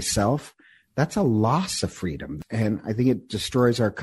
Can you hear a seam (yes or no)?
yes